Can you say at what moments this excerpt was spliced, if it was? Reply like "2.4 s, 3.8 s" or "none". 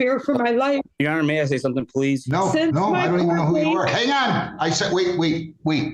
1.0 s, 2.2 s